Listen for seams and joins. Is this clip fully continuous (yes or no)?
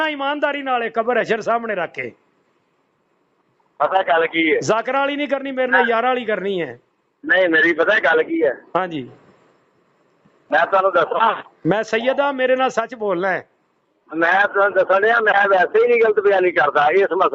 yes